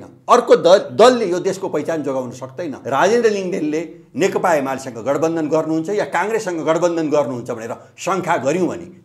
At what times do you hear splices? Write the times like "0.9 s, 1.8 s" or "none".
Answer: 2.8 s